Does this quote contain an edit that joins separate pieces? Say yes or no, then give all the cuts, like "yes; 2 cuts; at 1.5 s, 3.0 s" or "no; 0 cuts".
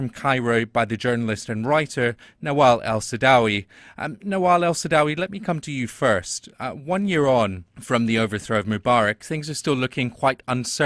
no; 0 cuts